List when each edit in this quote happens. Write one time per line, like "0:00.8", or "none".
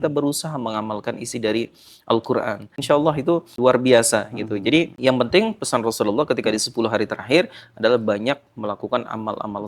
0:02.7
0:03.5
0:04.9